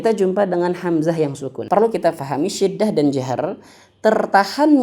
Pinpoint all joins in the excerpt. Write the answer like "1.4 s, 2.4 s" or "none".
1.5 s